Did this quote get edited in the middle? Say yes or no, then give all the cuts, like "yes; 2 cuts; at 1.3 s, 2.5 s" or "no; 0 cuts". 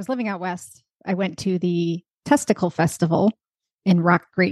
no; 0 cuts